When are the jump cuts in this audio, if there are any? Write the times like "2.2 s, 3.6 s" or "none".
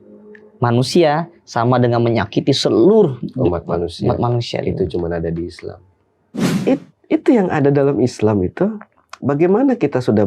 6.5 s